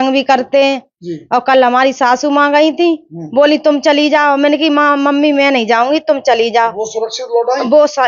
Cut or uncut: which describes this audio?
uncut